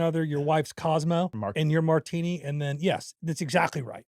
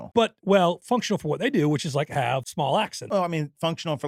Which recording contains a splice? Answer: first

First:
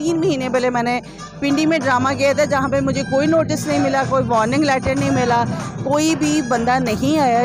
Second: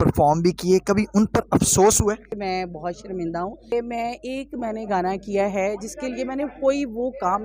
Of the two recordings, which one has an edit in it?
second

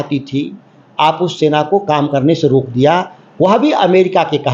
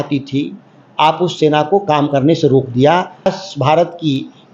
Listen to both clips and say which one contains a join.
second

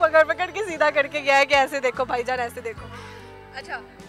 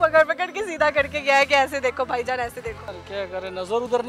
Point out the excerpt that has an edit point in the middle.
second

